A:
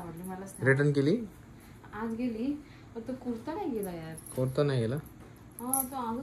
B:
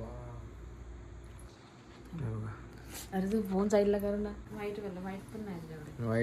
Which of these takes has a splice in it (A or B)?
B